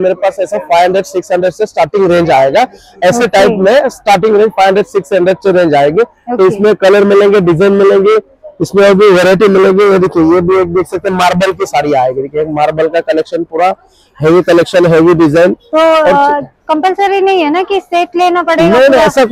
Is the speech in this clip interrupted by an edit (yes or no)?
no